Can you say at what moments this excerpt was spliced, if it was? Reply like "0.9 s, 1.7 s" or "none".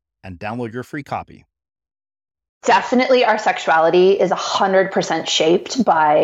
2.6 s